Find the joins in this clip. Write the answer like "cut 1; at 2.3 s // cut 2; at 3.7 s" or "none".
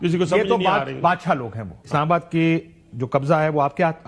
cut 1; at 1.7 s